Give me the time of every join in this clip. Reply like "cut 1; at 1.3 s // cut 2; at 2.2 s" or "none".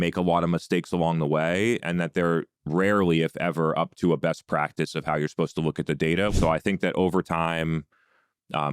cut 1; at 6.3 s